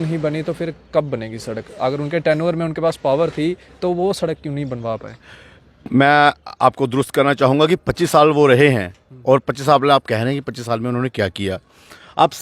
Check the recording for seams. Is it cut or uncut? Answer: uncut